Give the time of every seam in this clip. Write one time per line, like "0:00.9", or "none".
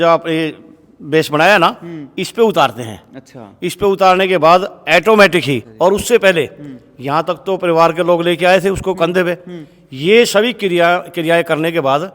0:05.7